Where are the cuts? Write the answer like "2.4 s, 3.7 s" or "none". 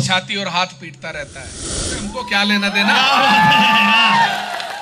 1.9 s